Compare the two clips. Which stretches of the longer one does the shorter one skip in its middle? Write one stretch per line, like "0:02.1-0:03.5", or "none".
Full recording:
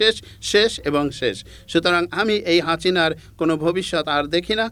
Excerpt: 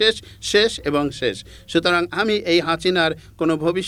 none